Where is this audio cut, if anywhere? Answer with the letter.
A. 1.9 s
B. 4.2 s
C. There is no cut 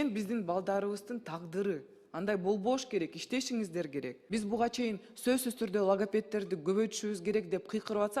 B